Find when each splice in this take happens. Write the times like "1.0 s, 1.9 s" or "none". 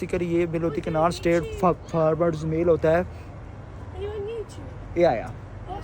none